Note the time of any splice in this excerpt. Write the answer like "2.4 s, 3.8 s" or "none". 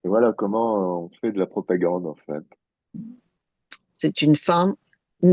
2.9 s